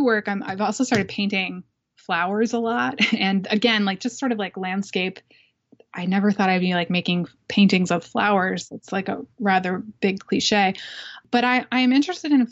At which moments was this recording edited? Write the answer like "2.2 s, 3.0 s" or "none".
none